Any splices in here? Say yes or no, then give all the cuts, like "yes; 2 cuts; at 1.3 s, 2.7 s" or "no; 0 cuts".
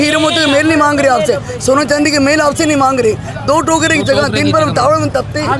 no; 0 cuts